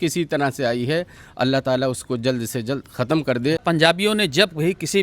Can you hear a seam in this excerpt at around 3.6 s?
yes; 1 cut; at 3.6 s

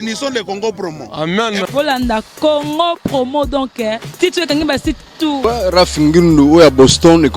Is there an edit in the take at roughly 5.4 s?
yes; 1 cut; at 5.4 s

